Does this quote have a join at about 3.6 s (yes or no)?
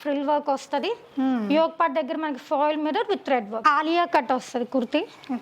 yes